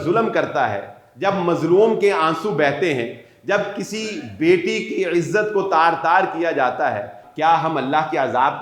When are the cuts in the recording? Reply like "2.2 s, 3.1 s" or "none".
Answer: 7.2 s